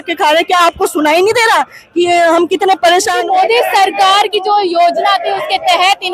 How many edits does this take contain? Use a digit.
1